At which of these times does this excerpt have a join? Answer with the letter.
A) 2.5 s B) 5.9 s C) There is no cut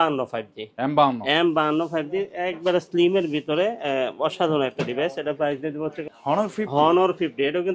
B